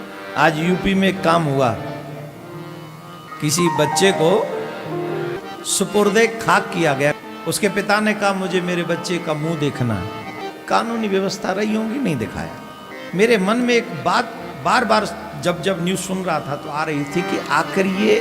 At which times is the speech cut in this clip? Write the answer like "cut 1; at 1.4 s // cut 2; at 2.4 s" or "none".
cut 1; at 3.2 s // cut 2; at 5.3 s // cut 3; at 7.2 s // cut 4; at 10.4 s // cut 5; at 12.9 s